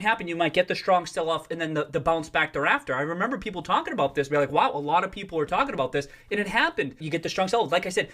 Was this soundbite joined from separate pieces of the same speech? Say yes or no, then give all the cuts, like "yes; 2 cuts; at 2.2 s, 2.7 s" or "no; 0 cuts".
yes; 1 cut; at 7.0 s